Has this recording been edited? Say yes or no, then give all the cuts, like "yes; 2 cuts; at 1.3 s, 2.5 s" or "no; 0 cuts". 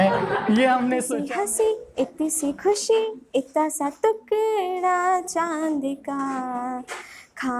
yes; 1 cut; at 1.1 s